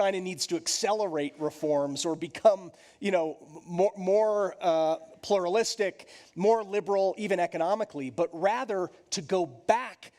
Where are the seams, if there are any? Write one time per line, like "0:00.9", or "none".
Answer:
none